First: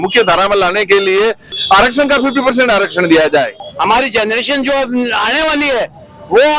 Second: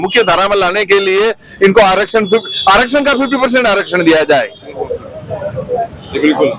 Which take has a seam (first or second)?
first